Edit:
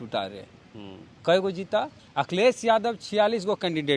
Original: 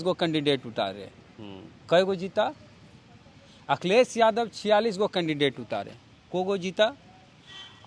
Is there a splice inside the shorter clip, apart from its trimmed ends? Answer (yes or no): yes